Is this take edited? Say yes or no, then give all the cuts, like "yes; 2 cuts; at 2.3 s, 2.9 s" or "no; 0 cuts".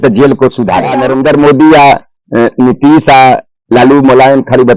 yes; 1 cut; at 1.0 s